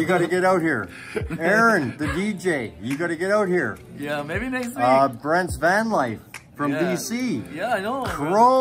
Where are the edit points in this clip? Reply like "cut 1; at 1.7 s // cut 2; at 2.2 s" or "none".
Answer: none